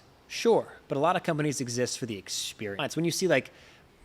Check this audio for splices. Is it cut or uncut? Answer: cut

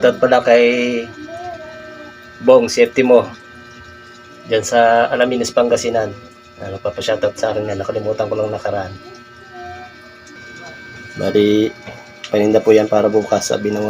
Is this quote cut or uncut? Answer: cut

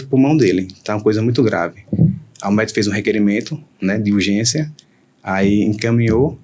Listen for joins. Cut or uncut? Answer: uncut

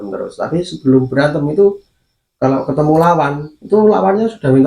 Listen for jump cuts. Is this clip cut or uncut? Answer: uncut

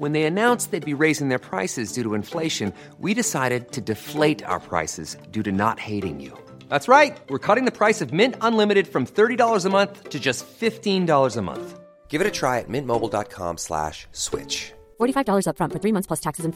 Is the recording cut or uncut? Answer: uncut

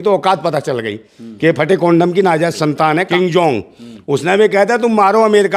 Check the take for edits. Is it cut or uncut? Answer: cut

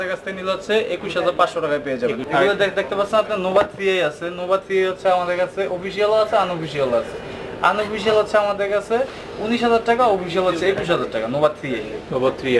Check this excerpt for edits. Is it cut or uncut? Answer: cut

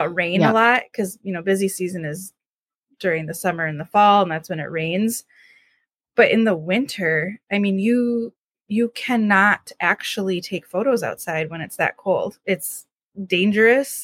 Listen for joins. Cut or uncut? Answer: uncut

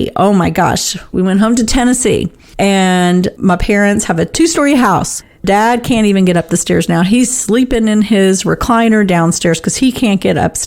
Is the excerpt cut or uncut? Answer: cut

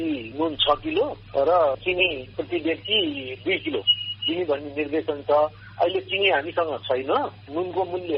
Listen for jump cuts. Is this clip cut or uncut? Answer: uncut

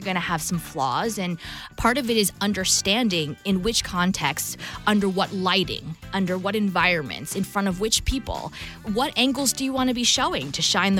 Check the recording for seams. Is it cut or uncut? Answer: uncut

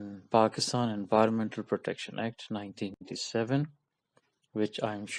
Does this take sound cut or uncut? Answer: cut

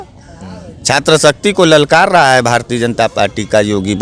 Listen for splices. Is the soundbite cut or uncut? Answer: uncut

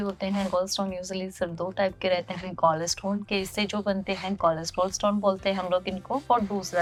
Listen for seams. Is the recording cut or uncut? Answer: uncut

